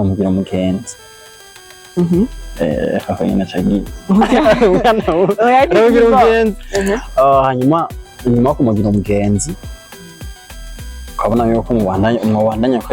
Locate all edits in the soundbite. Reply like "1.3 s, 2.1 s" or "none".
none